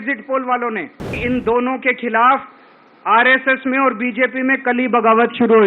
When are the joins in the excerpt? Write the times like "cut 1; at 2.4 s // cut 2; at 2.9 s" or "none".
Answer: cut 1; at 1.1 s

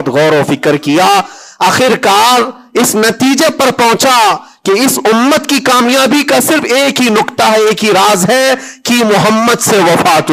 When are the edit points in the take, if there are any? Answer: none

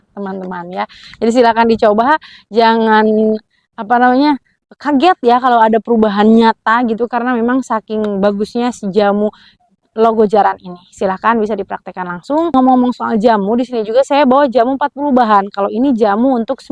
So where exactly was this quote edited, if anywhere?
cut 1; at 12.5 s

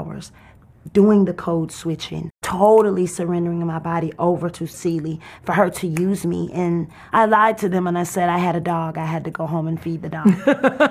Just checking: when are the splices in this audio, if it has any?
cut 1; at 2.4 s // cut 2; at 4.8 s // cut 3; at 7.0 s

